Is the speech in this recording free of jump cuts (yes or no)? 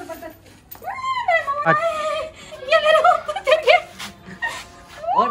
no